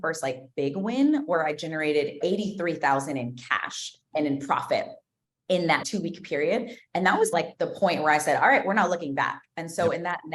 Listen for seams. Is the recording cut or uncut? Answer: cut